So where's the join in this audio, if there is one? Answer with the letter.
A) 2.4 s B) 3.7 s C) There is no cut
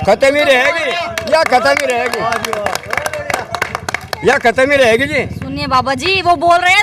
C